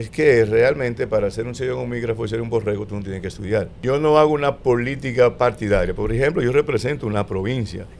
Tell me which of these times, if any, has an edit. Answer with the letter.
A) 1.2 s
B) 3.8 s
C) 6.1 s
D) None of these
B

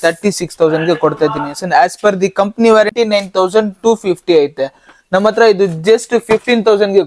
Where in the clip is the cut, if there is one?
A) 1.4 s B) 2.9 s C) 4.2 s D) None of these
B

